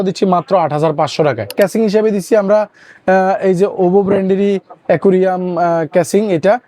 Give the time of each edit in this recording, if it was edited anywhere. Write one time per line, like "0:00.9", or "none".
0:01.5